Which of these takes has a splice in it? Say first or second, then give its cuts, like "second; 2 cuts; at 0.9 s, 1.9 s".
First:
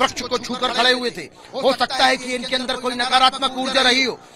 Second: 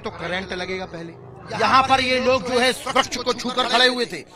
second; 1 cut; at 1.4 s